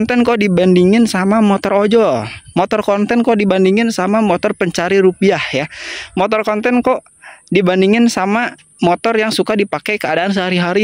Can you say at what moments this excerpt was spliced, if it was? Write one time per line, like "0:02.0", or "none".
none